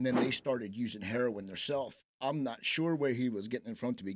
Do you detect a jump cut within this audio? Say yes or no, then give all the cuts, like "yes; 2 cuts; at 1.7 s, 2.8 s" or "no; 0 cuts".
no; 0 cuts